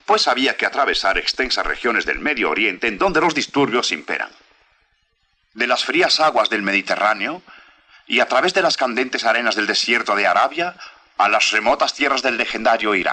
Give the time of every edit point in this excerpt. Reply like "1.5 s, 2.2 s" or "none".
none